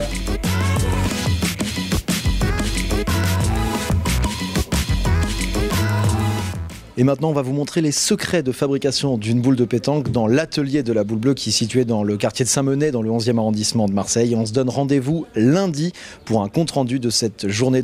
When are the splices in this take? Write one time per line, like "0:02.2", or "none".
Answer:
0:16.0

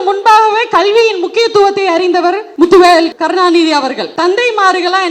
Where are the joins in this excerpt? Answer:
0:02.5
0:03.1
0:04.1

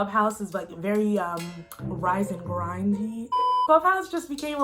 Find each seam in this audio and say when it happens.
0:03.6

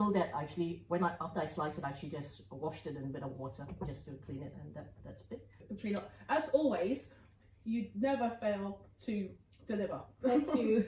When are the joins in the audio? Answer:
0:05.6

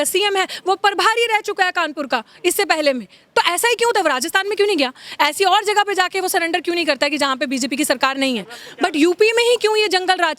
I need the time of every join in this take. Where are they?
0:08.6

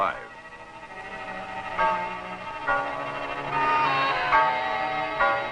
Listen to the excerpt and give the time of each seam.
none

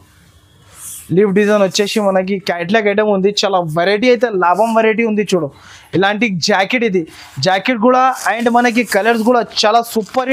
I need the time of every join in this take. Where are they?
none

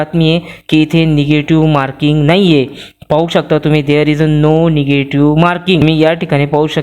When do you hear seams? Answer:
0:05.8

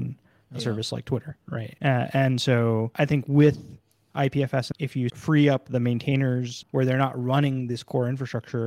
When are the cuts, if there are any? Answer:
0:01.6
0:02.9
0:04.9
0:06.6

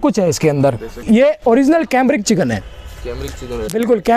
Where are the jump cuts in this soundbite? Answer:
0:01.0

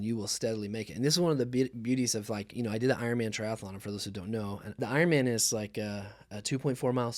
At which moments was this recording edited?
0:04.8

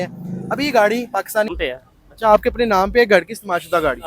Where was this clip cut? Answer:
0:01.5

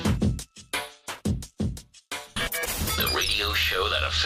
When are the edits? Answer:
0:02.3

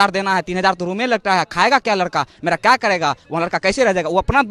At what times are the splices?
none

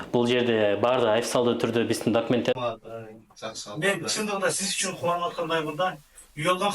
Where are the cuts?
0:02.5

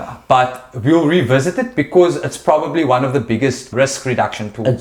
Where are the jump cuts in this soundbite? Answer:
0:03.7

